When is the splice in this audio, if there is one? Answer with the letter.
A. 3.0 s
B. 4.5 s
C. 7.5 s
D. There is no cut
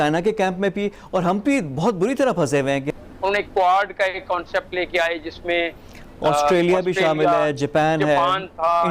A